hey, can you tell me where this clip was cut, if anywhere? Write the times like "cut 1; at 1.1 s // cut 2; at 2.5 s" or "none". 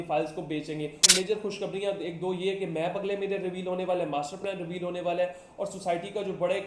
cut 1; at 1.1 s